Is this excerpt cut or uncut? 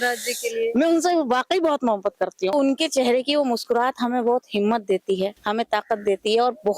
cut